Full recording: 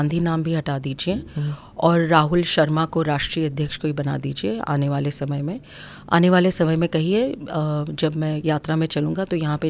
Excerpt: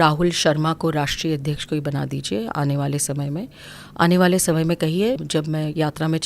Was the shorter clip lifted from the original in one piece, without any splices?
no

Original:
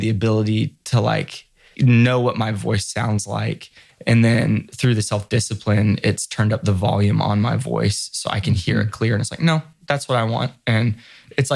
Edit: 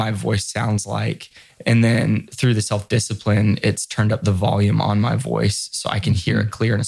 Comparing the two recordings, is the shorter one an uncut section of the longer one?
yes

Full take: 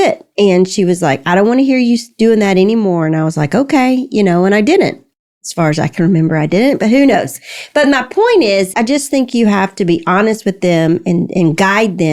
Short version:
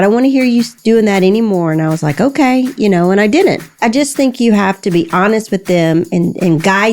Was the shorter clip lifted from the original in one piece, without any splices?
no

